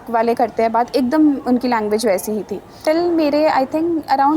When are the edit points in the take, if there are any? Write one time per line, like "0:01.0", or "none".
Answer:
0:02.8